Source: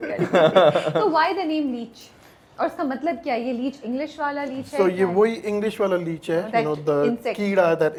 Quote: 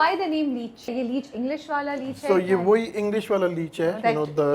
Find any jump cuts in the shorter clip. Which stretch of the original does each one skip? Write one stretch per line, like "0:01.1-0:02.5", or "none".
0:02.1-0:03.4